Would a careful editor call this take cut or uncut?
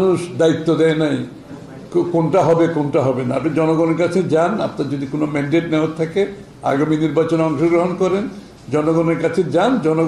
uncut